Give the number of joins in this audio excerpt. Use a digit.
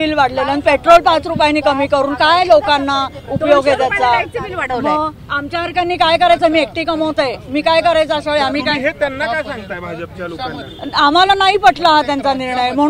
0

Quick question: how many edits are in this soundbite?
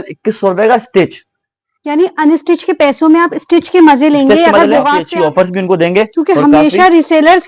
1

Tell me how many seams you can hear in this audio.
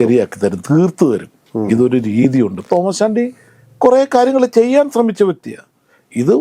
1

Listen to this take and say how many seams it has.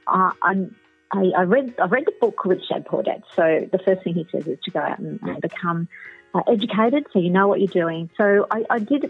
1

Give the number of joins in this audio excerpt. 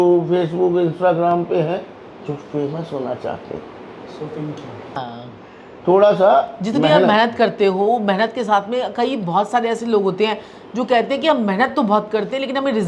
0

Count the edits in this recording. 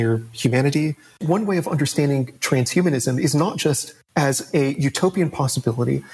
1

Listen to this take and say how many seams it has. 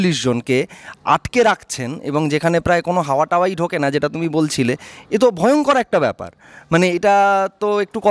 0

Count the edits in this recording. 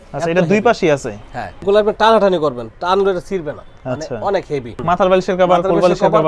2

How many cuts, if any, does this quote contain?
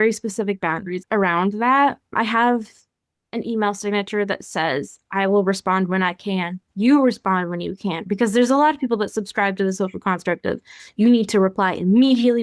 1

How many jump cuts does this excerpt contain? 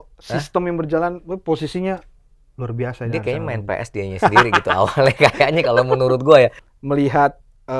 1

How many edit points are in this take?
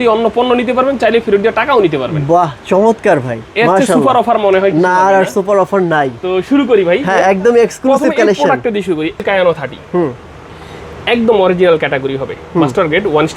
0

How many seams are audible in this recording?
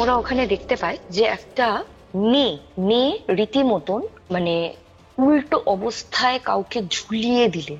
2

